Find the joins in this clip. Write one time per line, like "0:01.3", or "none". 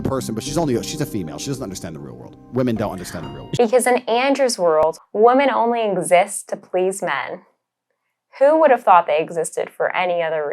0:03.4
0:04.8